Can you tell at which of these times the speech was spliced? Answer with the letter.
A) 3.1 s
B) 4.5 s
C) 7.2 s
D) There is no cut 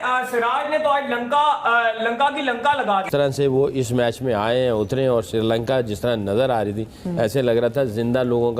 A